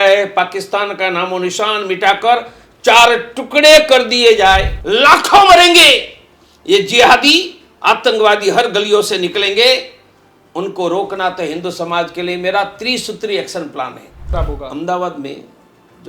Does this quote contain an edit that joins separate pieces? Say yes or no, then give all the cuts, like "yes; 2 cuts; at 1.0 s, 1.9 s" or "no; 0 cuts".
yes; 2 cuts; at 4.8 s, 14.3 s